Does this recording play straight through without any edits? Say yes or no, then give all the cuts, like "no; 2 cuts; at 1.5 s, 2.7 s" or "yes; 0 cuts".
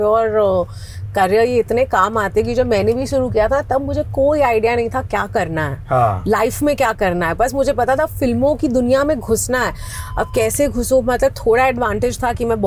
yes; 0 cuts